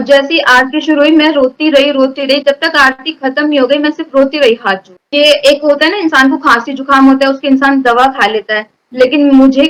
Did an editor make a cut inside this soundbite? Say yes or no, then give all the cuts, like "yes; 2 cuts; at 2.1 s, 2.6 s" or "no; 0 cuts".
no; 0 cuts